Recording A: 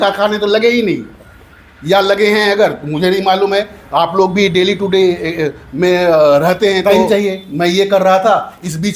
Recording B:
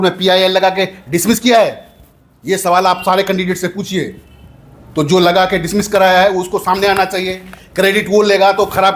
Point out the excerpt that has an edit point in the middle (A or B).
A